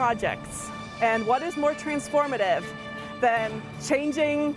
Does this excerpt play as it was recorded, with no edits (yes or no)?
no